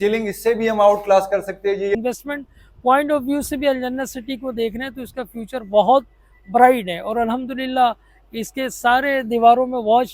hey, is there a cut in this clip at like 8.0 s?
no; 1 cut; at 2.0 s

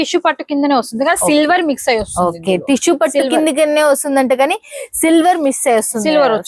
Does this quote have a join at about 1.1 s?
no; 0 cuts

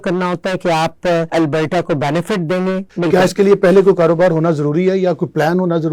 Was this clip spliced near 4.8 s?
no; 2 cuts; at 1.3 s, 2.9 s

